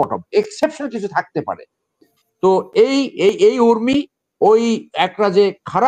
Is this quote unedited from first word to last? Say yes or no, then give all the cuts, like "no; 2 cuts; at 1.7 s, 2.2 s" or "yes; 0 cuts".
yes; 0 cuts